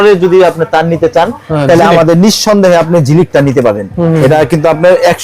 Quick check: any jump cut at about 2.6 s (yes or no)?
no